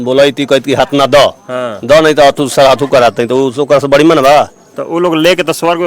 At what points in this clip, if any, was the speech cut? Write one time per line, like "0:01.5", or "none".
none